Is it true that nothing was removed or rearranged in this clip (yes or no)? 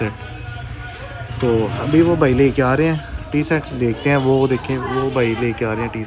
yes